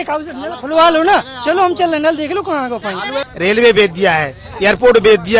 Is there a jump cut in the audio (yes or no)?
yes